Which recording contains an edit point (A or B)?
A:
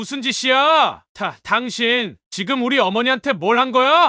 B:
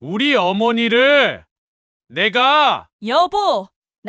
A